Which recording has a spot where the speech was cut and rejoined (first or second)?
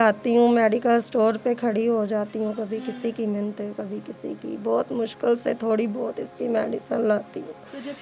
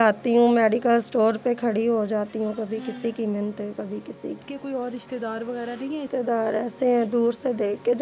second